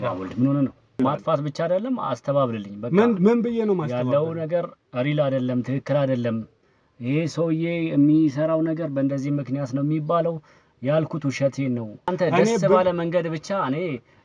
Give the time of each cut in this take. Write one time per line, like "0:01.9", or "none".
0:01.0
0:12.1